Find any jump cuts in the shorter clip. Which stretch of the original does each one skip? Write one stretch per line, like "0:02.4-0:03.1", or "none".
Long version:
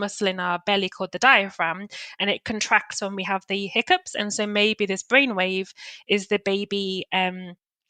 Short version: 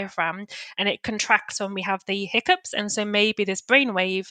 none